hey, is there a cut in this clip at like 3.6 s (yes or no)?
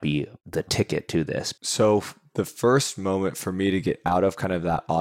no